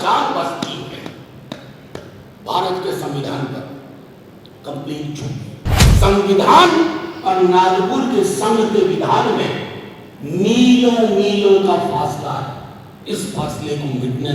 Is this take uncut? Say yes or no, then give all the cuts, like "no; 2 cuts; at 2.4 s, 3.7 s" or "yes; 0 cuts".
no; 1 cut; at 5.8 s